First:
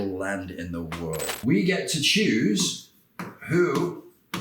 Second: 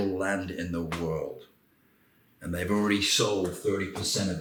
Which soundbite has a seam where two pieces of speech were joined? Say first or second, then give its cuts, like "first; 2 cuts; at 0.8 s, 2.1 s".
first; 1 cut; at 1.4 s